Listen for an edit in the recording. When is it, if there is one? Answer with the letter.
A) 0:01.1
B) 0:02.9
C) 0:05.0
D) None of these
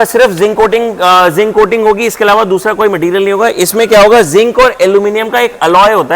D